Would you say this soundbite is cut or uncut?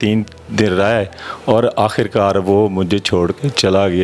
uncut